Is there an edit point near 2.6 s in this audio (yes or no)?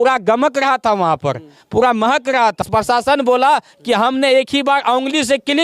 yes